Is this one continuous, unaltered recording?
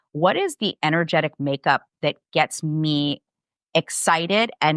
yes; 0 cuts

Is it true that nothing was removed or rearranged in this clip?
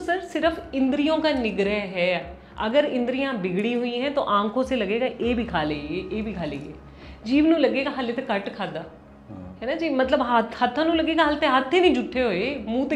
yes; 0 cuts

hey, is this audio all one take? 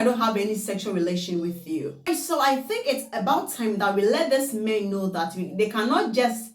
no; 1 cut; at 2.2 s

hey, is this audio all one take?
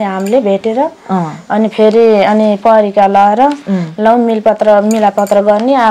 yes; 0 cuts

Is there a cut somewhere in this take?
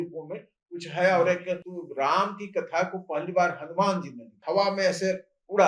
yes; 2 cuts; at 1.8 s, 4.4 s

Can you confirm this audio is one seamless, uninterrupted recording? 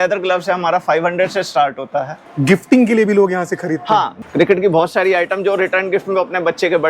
no; 2 cuts; at 2.2 s, 4.2 s

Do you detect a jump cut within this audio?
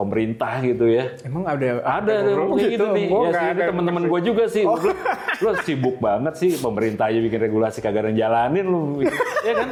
no; 0 cuts

